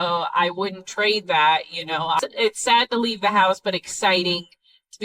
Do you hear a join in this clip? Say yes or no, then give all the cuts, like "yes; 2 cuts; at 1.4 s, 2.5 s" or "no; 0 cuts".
yes; 1 cut; at 2.2 s